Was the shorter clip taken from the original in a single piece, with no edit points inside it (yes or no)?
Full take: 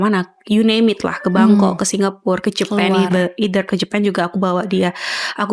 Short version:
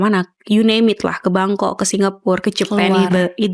yes